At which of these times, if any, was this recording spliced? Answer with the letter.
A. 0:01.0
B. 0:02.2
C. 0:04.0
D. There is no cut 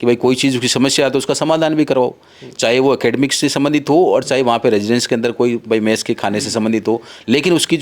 D